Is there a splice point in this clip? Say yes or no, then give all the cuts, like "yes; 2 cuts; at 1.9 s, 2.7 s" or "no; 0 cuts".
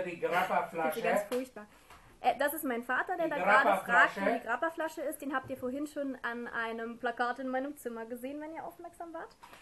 yes; 1 cut; at 3.4 s